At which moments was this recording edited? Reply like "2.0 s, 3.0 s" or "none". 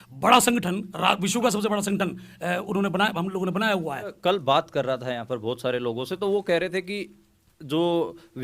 4.1 s